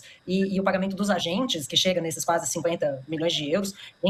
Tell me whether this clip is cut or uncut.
uncut